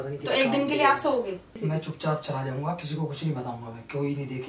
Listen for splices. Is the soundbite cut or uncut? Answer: cut